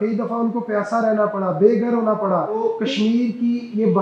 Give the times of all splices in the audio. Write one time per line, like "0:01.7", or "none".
0:02.7